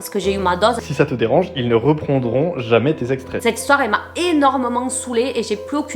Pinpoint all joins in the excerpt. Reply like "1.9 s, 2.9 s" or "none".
0.8 s, 3.4 s